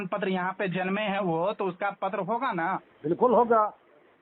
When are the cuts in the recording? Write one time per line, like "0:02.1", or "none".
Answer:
0:02.9